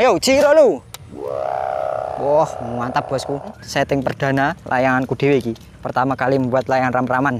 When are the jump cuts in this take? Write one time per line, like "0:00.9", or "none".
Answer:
0:03.6